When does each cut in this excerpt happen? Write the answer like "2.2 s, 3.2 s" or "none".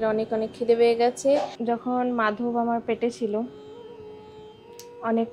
1.5 s